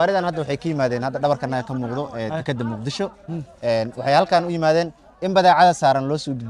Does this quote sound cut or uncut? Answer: uncut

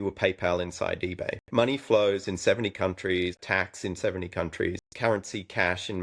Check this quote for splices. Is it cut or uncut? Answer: cut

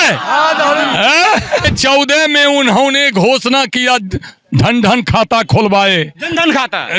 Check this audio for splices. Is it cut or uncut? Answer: cut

